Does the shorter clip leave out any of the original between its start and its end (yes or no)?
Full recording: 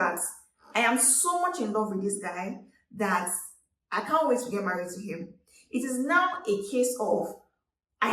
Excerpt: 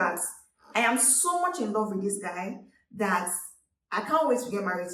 no